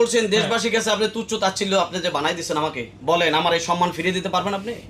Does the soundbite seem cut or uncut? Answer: uncut